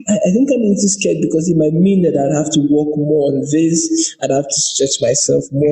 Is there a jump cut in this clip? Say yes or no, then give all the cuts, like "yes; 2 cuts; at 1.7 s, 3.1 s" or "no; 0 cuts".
no; 0 cuts